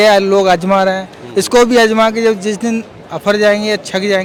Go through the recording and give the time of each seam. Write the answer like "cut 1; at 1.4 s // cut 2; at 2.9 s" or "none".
none